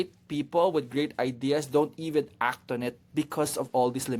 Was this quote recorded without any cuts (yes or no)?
yes